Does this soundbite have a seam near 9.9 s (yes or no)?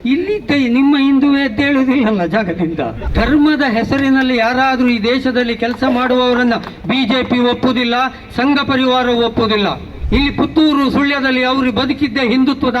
yes